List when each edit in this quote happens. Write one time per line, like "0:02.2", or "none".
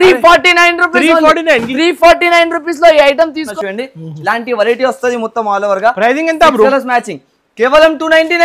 0:03.4